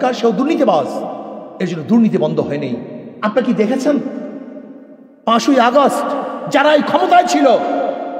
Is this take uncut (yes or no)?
no